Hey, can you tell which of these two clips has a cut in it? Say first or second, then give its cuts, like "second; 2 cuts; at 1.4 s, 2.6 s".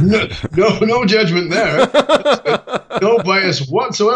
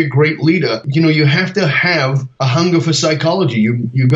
second; 2 cuts; at 0.9 s, 2.3 s